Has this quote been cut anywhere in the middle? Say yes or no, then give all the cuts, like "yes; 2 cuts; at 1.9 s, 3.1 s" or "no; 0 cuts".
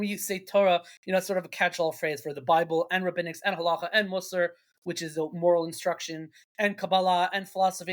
no; 0 cuts